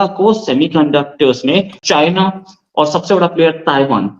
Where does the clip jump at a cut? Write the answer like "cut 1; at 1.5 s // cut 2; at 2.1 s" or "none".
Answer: cut 1; at 1.8 s